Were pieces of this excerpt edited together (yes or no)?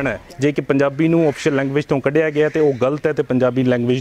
no